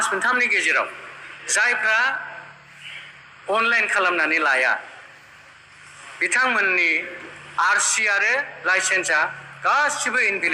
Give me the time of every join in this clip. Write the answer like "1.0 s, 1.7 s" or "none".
none